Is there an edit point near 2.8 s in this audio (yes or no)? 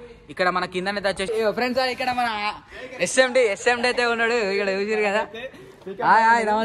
no